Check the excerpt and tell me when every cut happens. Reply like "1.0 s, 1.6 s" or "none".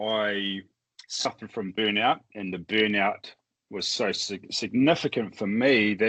none